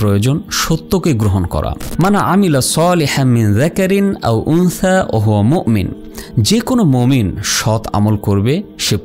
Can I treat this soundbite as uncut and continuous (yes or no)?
no